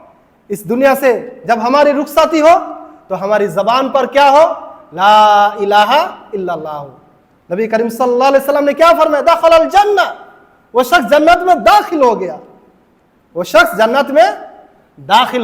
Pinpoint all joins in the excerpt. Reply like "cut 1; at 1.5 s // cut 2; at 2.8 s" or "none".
none

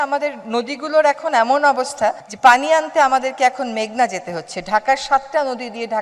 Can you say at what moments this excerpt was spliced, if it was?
none

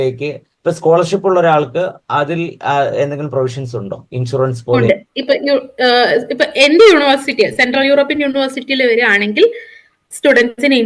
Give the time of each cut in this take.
none

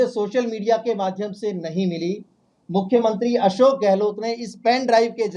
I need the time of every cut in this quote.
none

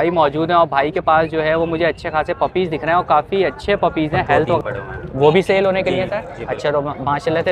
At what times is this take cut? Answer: cut 1; at 4.6 s

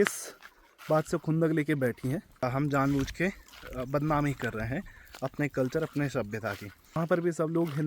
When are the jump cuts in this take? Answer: cut 1; at 2.4 s // cut 2; at 7.0 s

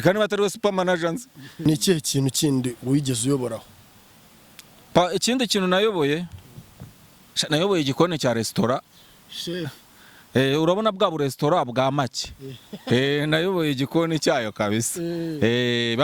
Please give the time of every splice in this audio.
cut 1; at 1.5 s

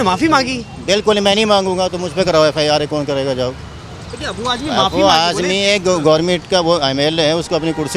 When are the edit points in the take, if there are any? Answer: none

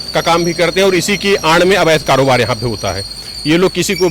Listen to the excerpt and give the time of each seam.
none

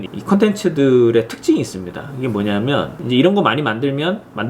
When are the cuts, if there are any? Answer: cut 1; at 3.0 s

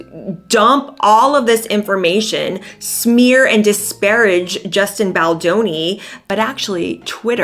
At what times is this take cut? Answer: cut 1; at 6.2 s

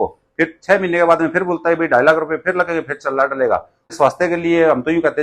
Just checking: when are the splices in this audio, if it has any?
cut 1; at 3.9 s

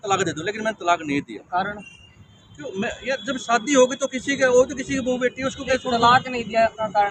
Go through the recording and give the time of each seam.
none

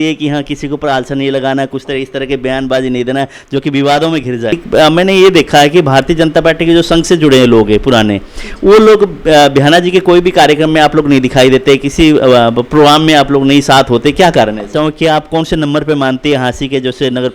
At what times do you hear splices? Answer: cut 1; at 4.5 s // cut 2; at 14.7 s

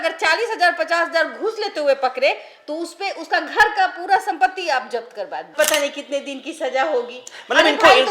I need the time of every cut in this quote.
cut 1; at 5.5 s

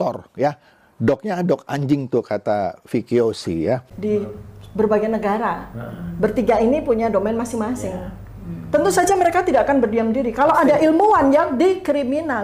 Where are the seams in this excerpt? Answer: cut 1; at 3.9 s

